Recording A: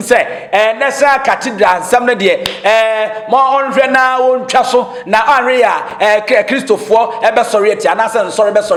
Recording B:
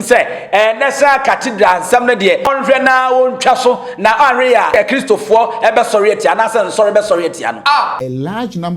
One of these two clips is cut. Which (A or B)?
B